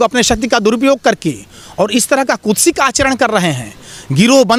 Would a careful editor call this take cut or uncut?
uncut